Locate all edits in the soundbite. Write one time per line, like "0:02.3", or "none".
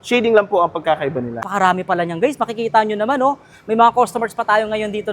0:01.3